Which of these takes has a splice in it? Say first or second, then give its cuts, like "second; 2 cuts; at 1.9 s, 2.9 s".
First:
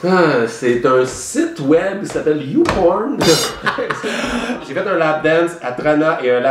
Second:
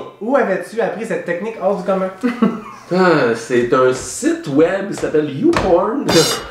first; 1 cut; at 4.7 s